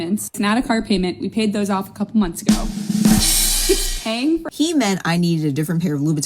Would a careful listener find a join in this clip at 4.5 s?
yes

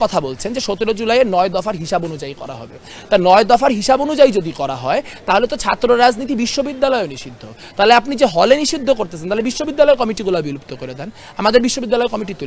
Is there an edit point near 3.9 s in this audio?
no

